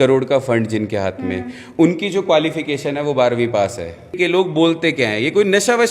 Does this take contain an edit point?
yes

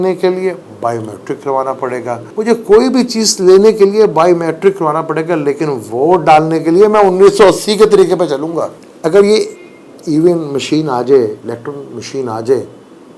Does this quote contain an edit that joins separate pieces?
yes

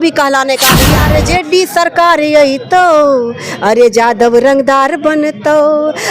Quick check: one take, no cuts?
no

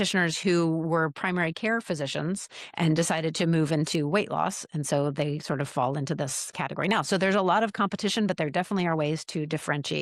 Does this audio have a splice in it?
no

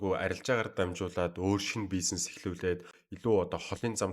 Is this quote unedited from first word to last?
no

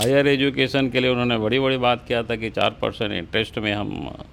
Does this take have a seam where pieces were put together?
no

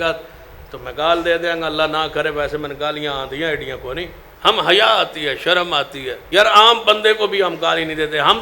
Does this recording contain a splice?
yes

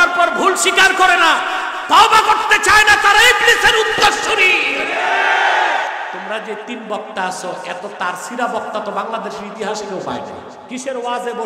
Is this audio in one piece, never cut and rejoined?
no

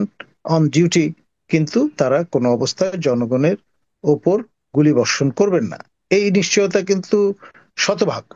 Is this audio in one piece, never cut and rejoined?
yes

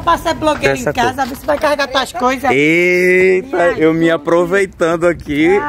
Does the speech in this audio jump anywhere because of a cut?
no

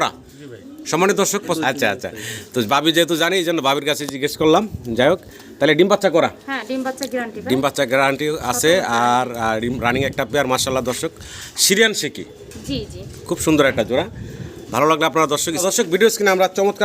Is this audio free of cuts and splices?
no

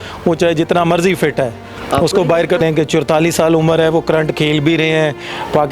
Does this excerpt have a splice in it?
yes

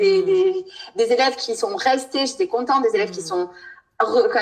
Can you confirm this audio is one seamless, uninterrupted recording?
yes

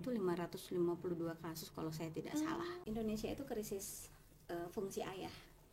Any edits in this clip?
yes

